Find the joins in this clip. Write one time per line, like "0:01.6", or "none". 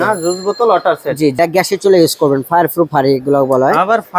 0:01.3